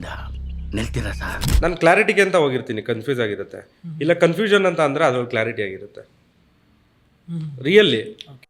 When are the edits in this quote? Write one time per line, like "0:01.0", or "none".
0:01.4